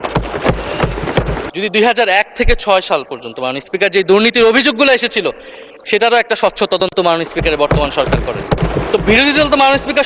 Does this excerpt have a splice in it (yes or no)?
yes